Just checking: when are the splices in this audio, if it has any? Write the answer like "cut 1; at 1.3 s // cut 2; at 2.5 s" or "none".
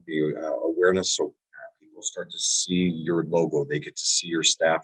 none